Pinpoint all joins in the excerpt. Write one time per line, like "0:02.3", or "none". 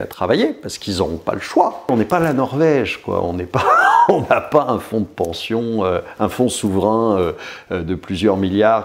0:01.9